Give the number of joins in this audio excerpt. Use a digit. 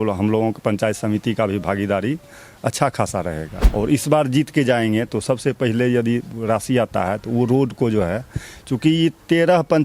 1